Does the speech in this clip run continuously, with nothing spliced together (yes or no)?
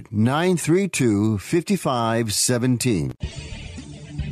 no